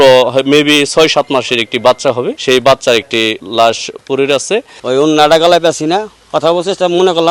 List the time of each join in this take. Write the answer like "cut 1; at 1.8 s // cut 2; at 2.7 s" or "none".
cut 1; at 4.6 s // cut 2; at 6.2 s